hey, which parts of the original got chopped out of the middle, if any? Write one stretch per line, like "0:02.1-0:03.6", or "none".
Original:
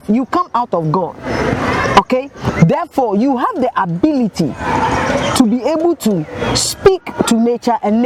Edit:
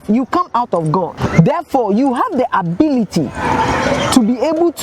0:01.2-0:02.4